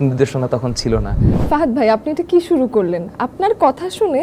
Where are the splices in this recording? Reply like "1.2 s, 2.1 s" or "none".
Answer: 1.4 s